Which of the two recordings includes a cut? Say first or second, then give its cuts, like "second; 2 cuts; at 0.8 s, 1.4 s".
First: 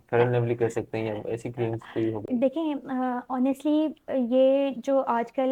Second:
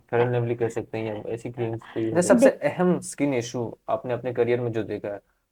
second; 1 cut; at 2.5 s